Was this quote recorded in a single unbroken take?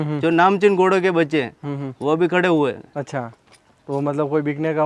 yes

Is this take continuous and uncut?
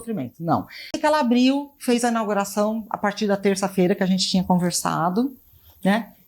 no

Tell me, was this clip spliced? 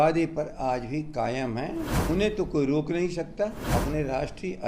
yes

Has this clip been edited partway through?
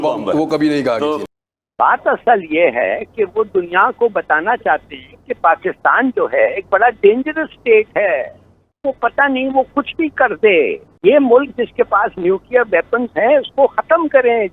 yes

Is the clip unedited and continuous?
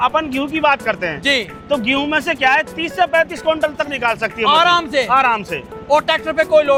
yes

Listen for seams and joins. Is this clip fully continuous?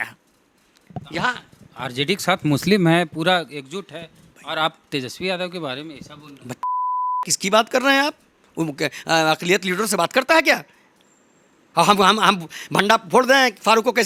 yes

